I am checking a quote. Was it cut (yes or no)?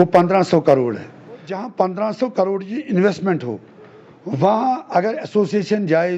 yes